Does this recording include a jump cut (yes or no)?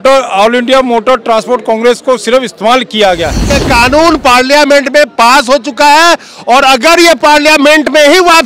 yes